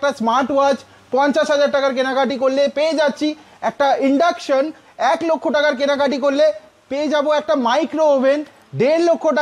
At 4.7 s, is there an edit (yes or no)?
no